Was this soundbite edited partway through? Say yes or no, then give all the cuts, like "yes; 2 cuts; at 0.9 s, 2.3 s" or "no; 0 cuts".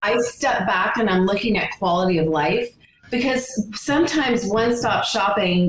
no; 0 cuts